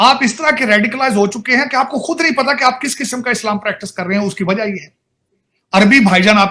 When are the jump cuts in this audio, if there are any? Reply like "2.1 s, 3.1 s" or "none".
none

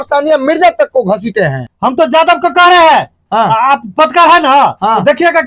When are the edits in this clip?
1.6 s

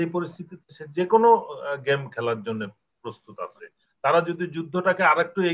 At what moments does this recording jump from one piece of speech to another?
3.9 s

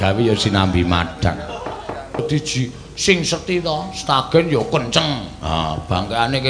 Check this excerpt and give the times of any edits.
2.2 s

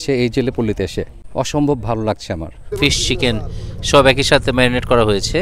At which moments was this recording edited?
1.2 s, 2.6 s

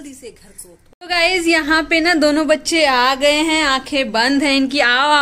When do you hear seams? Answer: 1.0 s

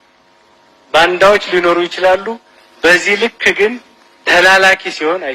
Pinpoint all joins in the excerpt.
none

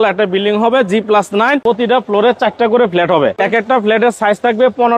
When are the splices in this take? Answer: 1.6 s, 3.4 s

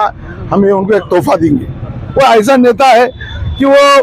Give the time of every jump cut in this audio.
2.0 s

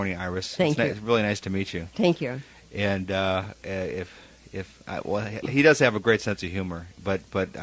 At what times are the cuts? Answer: none

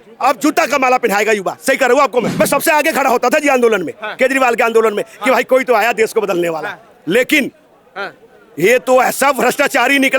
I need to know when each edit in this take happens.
2.3 s

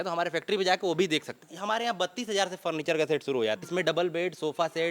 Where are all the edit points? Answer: 1.4 s, 3.6 s

